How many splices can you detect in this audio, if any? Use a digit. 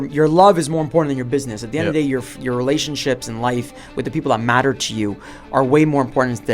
0